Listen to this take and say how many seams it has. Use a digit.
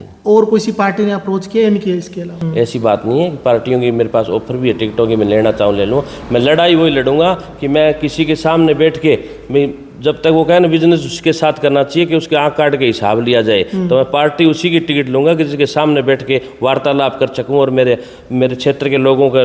1